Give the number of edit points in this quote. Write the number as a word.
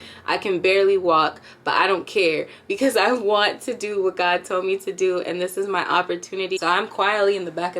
one